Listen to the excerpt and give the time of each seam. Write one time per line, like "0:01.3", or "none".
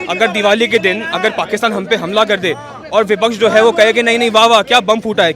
none

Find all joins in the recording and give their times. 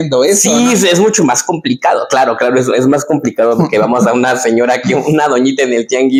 none

